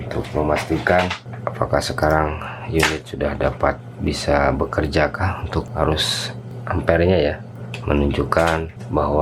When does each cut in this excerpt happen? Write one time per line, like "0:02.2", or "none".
0:07.5